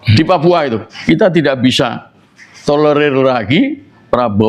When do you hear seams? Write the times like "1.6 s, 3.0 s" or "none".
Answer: 0.9 s